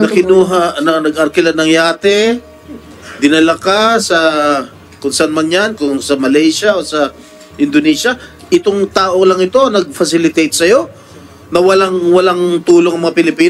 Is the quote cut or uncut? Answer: uncut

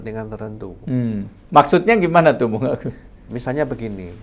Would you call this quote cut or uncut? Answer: uncut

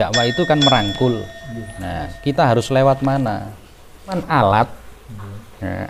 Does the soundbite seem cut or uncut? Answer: cut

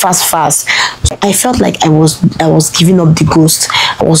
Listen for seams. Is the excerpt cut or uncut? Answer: cut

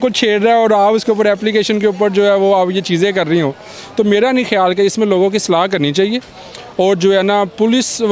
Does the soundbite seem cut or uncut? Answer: uncut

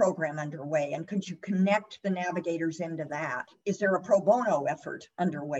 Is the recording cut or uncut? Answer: cut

